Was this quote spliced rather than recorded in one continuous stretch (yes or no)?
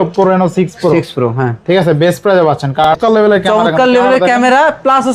yes